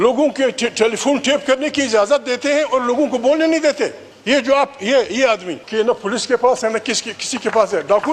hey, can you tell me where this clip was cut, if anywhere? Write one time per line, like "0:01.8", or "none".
0:04.1
0:05.6